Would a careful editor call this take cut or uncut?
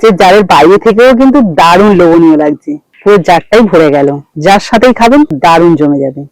uncut